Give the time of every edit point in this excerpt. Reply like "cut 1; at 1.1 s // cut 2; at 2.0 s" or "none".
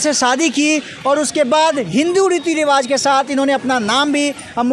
none